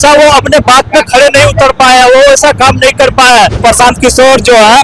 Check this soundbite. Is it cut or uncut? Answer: cut